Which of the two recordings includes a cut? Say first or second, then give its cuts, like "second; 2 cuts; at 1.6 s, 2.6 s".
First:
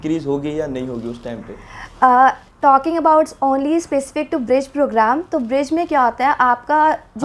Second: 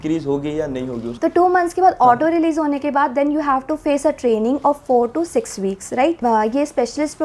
second; 2 cuts; at 1.1 s, 6.2 s